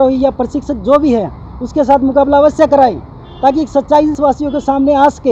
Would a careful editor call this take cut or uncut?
cut